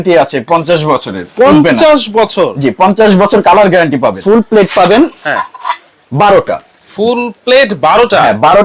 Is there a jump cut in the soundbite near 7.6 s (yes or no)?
no